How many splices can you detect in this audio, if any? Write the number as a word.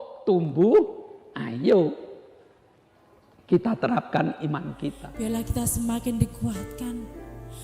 one